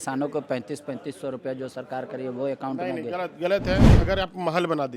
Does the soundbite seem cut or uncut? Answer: cut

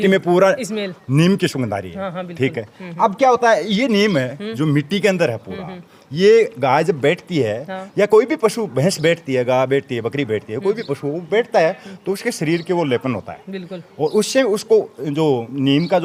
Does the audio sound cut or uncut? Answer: uncut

